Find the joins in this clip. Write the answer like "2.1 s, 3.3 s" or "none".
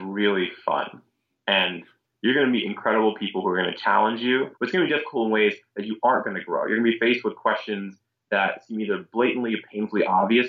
4.5 s